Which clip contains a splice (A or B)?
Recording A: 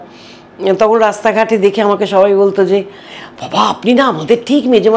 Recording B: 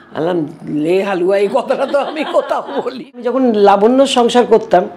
B